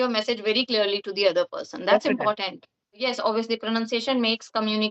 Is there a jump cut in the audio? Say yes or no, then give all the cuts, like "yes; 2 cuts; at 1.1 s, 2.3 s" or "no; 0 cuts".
yes; 1 cut; at 3.1 s